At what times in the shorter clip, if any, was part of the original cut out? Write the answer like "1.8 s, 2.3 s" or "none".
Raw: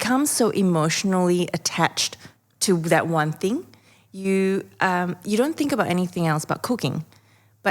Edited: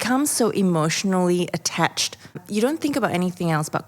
2.4 s